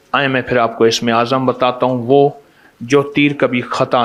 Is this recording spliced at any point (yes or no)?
no